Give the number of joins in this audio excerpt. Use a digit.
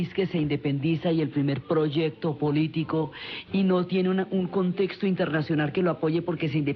1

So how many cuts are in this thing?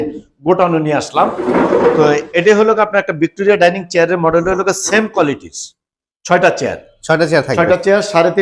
0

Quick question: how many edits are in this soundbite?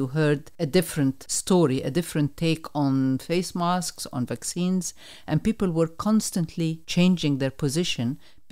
2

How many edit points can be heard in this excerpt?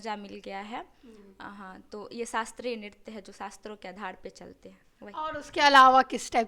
0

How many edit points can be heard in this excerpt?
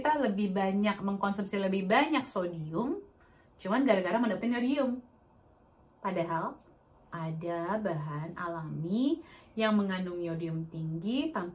0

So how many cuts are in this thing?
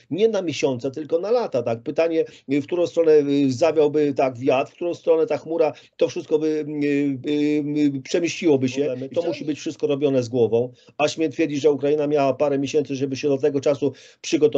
1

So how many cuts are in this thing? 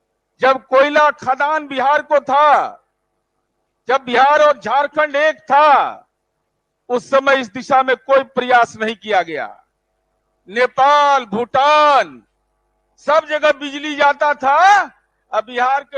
0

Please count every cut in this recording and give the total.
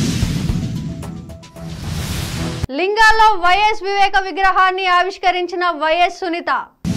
1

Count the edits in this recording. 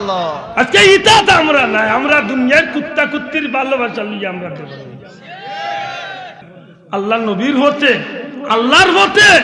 1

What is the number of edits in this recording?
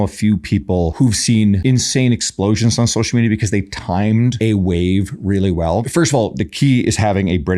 4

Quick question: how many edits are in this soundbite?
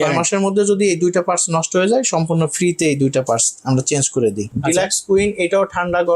1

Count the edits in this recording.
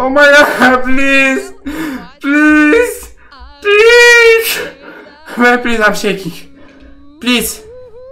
0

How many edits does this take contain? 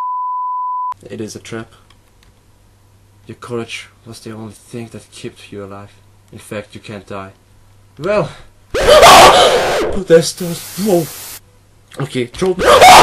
1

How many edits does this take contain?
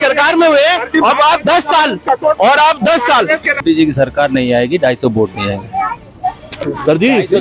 1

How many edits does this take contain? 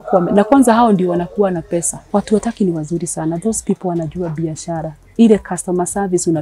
2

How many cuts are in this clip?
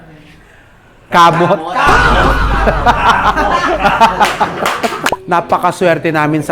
1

